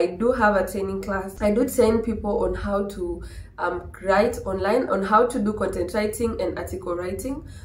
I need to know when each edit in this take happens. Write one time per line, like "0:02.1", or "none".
none